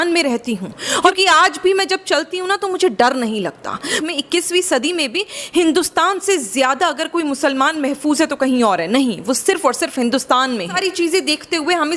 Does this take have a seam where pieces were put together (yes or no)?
yes